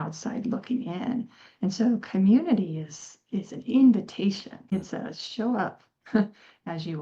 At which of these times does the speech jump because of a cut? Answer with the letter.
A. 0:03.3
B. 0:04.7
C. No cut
B